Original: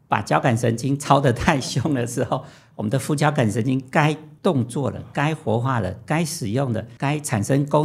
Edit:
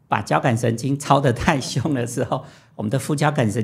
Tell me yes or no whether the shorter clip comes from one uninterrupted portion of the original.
yes